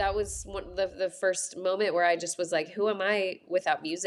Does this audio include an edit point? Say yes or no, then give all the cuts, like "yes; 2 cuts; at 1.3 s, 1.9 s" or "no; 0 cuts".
no; 0 cuts